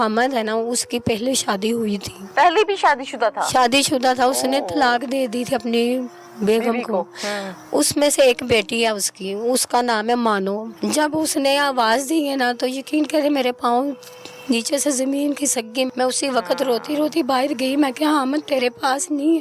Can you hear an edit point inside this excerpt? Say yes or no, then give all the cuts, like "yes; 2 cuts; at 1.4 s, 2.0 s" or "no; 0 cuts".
yes; 3 cuts; at 2.2 s, 10.7 s, 15.9 s